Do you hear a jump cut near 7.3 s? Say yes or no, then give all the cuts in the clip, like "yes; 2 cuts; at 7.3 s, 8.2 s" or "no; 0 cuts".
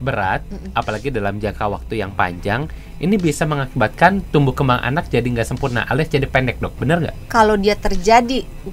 yes; 1 cut; at 7.3 s